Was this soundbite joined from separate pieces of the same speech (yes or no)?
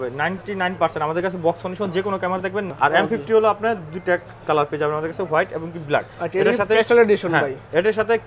yes